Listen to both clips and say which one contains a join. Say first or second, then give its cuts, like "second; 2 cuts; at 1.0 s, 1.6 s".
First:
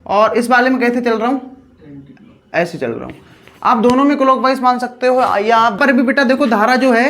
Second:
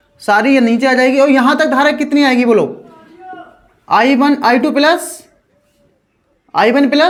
first; 1 cut; at 5.8 s